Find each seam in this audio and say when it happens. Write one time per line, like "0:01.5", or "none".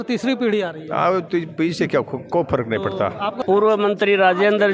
0:03.4